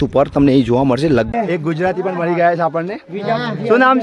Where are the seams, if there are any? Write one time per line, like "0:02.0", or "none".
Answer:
0:01.3